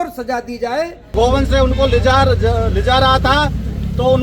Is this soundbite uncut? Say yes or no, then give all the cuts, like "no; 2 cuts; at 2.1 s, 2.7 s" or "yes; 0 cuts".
no; 1 cut; at 1.1 s